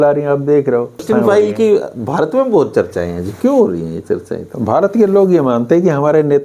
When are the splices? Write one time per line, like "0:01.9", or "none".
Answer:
0:01.0